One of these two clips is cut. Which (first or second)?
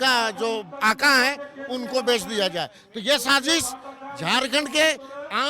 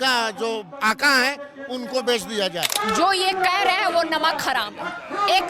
second